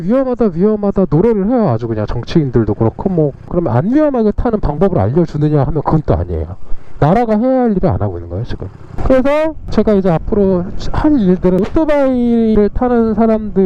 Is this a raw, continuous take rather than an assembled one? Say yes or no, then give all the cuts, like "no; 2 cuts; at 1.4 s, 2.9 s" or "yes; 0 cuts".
yes; 0 cuts